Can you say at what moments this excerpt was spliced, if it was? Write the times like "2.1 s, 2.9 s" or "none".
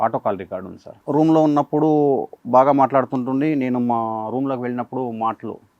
0.9 s

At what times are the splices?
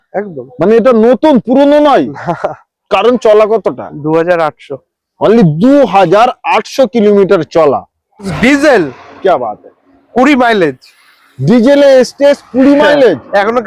8.3 s

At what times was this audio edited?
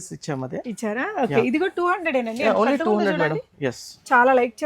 none

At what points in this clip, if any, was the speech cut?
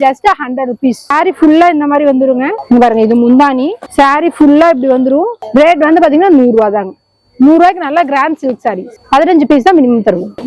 none

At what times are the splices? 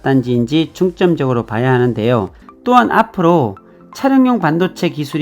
2.4 s

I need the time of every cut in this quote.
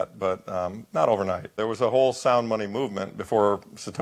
1.6 s

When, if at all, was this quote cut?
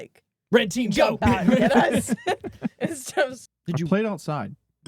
3.5 s

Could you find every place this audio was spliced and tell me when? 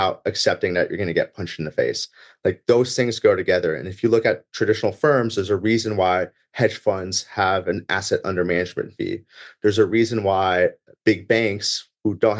none

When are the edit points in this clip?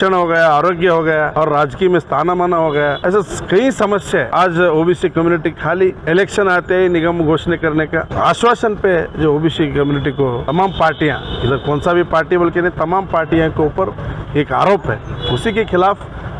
1.3 s, 3.0 s, 4.3 s, 6.0 s, 8.1 s, 10.4 s

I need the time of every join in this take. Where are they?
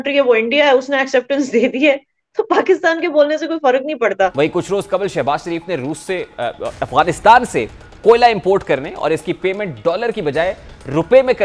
4.3 s

